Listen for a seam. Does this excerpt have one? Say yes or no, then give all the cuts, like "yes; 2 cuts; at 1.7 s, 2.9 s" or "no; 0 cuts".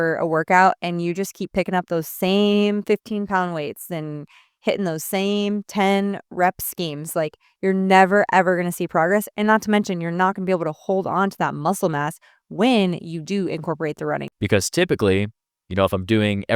yes; 1 cut; at 14.3 s